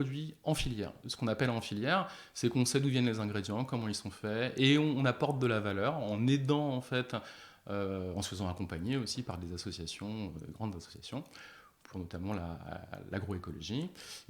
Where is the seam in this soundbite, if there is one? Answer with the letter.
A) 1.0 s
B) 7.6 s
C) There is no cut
A